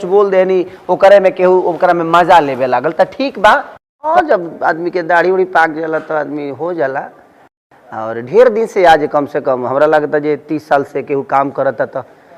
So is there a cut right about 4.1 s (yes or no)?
yes